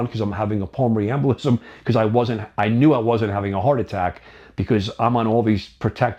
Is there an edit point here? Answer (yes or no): no